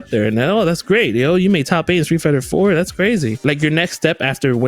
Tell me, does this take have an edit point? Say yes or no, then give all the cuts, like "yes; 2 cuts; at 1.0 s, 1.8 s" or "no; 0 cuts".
yes; 1 cut; at 3.4 s